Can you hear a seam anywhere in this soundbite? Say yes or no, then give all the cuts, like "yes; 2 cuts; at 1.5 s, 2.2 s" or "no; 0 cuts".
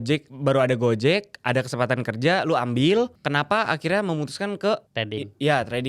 yes; 2 cuts; at 3.2 s, 4.9 s